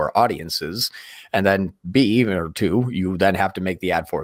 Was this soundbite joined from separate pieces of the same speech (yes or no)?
no